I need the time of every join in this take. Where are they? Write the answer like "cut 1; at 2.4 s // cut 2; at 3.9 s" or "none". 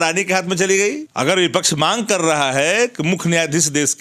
cut 1; at 1.1 s